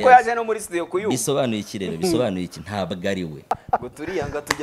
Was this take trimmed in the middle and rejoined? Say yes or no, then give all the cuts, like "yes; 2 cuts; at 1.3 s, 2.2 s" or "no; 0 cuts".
yes; 1 cut; at 3.4 s